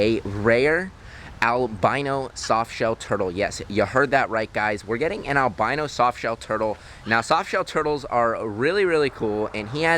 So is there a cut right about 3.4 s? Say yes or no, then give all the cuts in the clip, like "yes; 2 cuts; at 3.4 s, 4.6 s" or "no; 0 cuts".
no; 0 cuts